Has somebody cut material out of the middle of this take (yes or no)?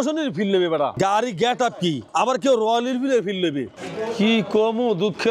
yes